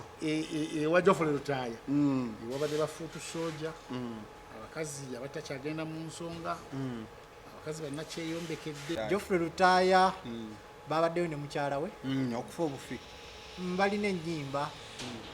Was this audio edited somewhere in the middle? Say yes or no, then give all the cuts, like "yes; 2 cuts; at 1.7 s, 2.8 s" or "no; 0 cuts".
yes; 1 cut; at 9.0 s